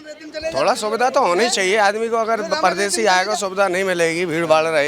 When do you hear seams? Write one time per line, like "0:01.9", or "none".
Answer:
none